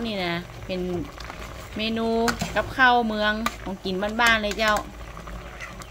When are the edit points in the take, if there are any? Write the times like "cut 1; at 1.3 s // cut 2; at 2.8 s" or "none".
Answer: none